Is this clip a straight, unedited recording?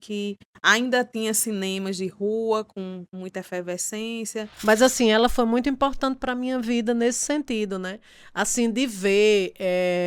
no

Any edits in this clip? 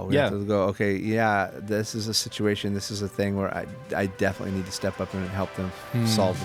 no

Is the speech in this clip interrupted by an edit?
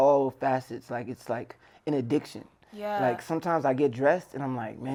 no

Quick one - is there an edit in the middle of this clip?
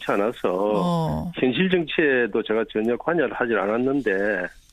yes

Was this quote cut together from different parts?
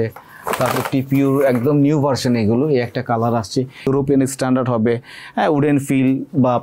yes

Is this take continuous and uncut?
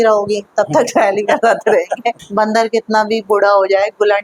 no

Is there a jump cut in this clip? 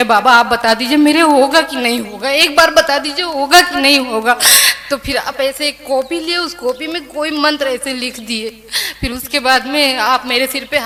no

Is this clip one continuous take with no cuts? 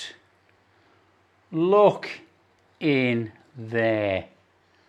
yes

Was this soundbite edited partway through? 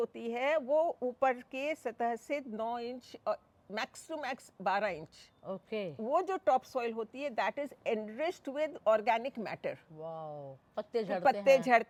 no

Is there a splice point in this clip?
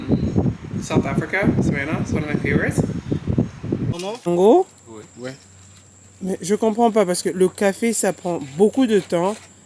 yes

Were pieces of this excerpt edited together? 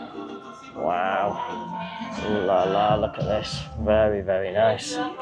no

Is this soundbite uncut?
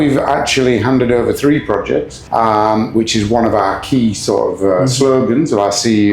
no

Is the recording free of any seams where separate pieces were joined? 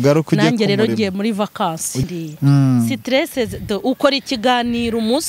no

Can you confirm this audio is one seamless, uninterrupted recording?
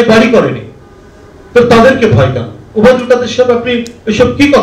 yes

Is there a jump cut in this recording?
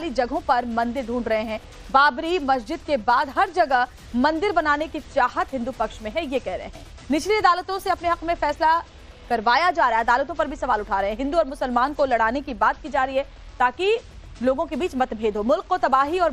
no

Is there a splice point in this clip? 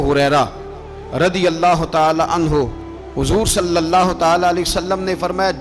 no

